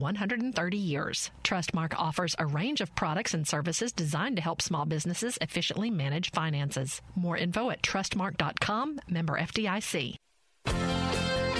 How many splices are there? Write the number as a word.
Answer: one